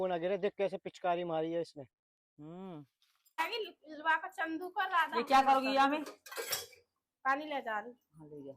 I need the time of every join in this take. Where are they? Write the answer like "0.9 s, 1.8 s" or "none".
3.4 s